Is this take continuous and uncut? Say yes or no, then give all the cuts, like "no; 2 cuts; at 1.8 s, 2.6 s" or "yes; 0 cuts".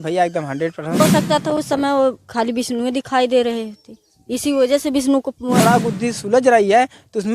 no; 2 cuts; at 1.0 s, 5.6 s